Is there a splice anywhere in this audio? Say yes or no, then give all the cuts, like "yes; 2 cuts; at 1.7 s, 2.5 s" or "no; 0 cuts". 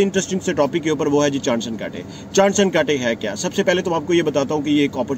no; 0 cuts